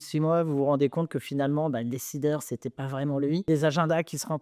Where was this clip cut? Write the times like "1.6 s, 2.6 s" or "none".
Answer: 3.4 s